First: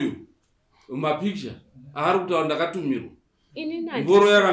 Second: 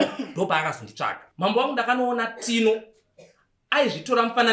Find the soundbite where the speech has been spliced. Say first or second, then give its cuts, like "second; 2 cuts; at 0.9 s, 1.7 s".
second; 1 cut; at 1.2 s